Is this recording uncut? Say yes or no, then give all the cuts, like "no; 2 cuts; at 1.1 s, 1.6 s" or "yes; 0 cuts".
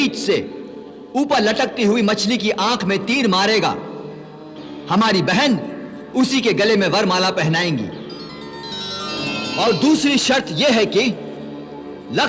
no; 1 cut; at 9.4 s